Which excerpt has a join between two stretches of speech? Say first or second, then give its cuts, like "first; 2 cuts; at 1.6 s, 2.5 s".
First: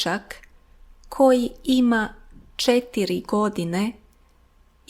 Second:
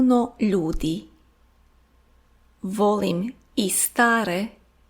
second; 1 cut; at 1.2 s